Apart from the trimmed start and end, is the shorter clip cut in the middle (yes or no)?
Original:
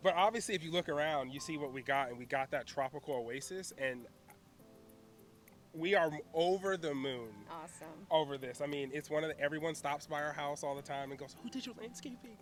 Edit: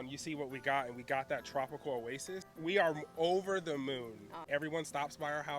yes